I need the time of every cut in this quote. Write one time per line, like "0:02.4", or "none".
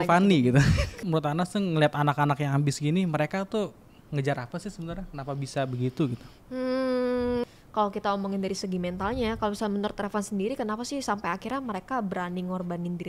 0:00.9
0:07.4

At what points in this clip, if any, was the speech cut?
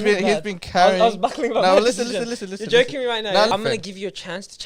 0:03.5

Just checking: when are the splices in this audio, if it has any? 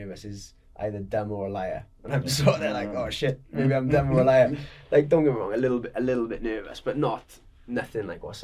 none

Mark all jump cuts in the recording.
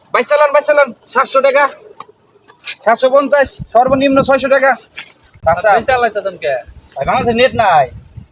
0:05.4

